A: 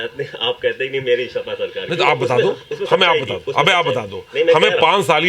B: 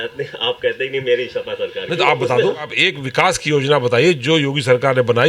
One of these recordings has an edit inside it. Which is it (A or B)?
B